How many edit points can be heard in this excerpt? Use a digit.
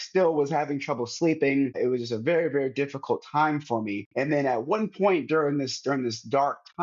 2